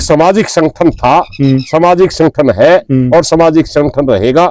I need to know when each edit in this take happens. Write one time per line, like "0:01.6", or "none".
none